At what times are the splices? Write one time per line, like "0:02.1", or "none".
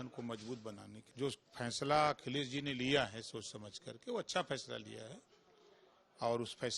0:00.9

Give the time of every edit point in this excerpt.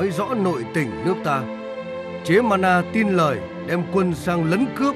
none

